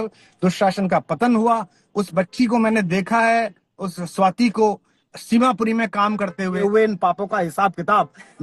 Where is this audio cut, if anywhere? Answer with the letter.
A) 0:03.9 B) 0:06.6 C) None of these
B